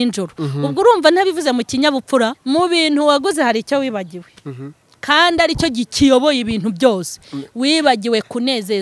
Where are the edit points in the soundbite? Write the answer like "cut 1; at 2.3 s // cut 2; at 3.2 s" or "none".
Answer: cut 1; at 2.4 s